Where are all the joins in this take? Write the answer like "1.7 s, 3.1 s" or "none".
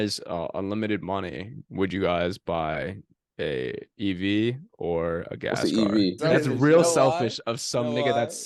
6.2 s